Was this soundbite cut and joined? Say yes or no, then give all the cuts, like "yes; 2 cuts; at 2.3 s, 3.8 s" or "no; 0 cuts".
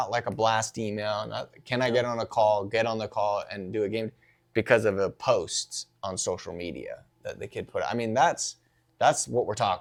no; 0 cuts